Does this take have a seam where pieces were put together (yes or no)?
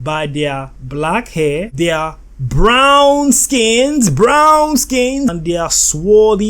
yes